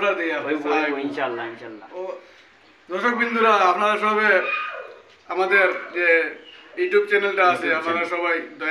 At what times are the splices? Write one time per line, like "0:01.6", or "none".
0:01.7